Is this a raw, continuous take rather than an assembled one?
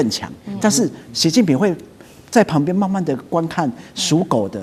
yes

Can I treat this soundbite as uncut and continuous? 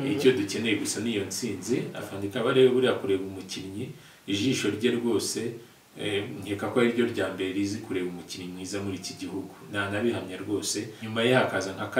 no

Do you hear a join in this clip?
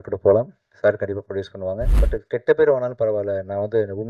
yes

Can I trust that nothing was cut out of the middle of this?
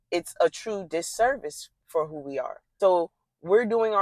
no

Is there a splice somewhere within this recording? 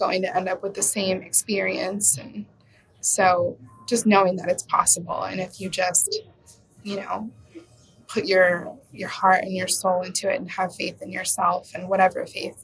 no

